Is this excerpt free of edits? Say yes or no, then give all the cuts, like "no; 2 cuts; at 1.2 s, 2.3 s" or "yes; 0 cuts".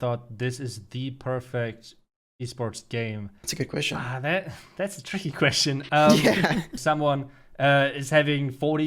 no; 2 cuts; at 3.4 s, 6.7 s